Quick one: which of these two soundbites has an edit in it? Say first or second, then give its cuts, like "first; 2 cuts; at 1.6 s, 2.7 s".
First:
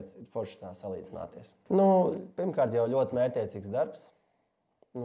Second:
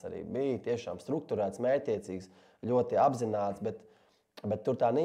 first; 1 cut; at 1.5 s